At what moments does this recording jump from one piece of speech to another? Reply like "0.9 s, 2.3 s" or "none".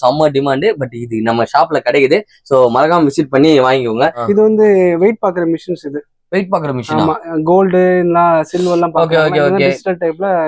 4.2 s